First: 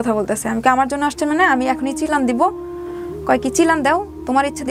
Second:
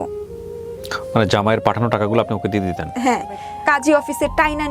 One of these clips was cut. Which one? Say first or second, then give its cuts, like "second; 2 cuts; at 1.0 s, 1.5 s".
second; 1 cut; at 3.4 s